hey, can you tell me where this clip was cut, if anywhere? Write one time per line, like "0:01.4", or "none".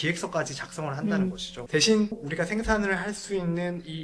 0:01.5